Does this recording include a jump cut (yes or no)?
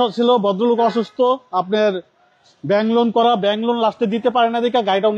no